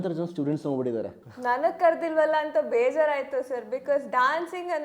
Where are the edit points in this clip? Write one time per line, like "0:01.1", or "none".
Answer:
0:01.2